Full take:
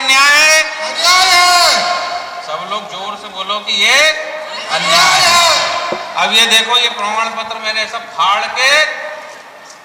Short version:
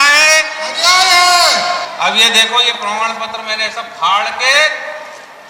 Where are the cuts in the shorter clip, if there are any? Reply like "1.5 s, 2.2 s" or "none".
1.9 s